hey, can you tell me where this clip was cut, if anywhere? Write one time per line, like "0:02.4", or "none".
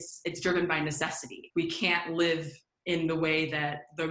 0:01.4

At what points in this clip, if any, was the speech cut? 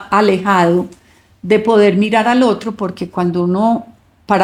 none

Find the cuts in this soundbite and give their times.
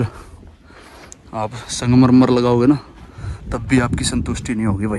none

